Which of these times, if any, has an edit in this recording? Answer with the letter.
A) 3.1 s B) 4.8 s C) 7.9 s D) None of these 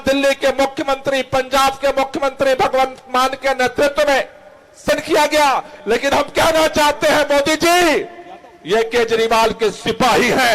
B